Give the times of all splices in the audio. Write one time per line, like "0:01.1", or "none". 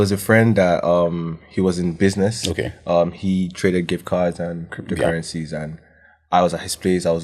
none